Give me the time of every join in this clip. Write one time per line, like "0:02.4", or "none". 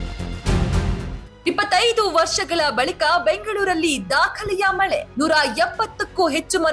0:01.1